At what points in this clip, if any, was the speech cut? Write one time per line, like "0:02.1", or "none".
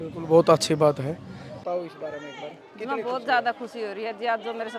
0:01.5